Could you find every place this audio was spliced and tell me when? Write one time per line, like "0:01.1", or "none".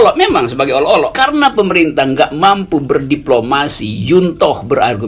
0:01.1